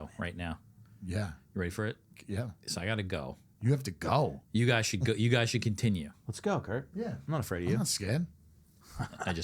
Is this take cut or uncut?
cut